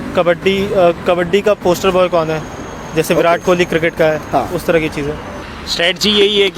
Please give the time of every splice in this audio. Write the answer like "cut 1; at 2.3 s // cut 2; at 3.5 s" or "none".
cut 1; at 5.4 s